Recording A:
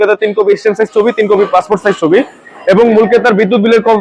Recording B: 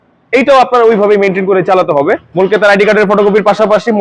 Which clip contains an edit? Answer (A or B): B